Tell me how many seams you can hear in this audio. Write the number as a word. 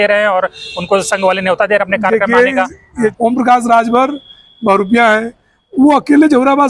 one